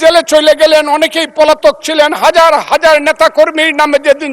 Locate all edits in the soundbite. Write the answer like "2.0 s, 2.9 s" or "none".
none